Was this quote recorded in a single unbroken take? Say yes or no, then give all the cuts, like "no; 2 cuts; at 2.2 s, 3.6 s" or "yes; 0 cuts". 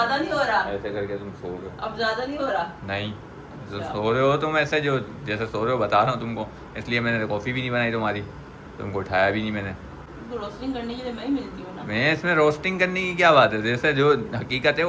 yes; 0 cuts